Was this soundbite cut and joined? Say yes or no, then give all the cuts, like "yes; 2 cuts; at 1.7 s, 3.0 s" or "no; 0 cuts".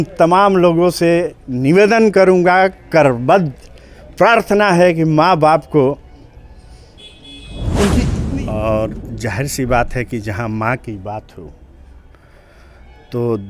yes; 1 cut; at 8.2 s